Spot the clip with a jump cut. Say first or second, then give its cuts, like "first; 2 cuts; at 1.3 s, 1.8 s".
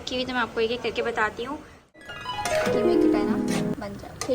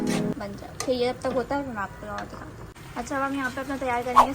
first; 1 cut; at 2.0 s